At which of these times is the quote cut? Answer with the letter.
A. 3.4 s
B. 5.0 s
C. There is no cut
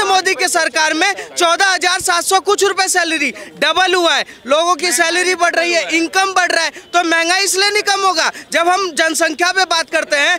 C